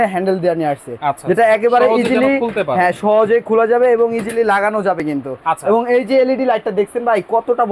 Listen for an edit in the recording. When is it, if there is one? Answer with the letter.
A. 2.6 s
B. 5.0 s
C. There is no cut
C